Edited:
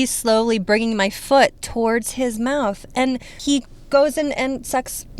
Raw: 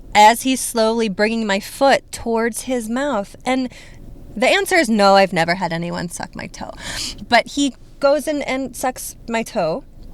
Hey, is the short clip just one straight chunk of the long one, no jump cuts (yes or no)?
no